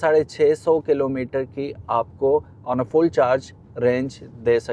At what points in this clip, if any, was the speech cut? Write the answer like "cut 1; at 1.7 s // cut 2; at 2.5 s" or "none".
none